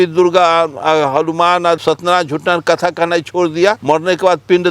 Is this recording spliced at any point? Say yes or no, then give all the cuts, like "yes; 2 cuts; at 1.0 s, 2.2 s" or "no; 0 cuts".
yes; 2 cuts; at 1.8 s, 3.8 s